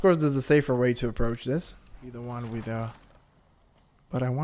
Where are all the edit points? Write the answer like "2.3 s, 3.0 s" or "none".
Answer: 2.2 s